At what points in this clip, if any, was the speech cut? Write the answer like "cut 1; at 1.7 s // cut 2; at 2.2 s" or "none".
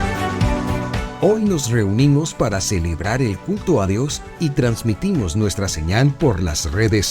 cut 1; at 1.1 s